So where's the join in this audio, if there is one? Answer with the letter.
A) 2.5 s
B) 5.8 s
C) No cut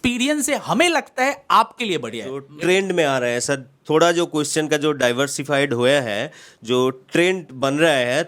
A